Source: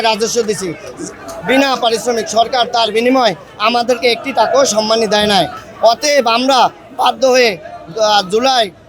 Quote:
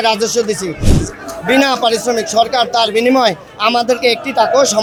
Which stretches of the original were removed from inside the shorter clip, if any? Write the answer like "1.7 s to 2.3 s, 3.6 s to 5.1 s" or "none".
none